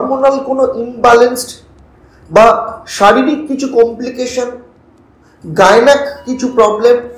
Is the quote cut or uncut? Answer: uncut